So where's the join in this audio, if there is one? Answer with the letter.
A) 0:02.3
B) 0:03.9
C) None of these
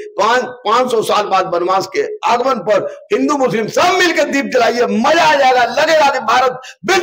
C